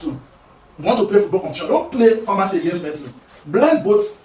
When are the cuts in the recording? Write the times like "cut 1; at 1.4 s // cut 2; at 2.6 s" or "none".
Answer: none